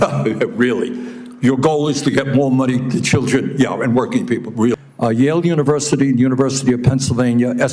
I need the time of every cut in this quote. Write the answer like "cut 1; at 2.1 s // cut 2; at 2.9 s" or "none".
cut 1; at 4.8 s